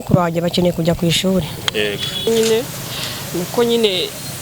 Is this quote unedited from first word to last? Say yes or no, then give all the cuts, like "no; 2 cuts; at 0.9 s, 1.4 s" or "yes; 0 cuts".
no; 1 cut; at 2.3 s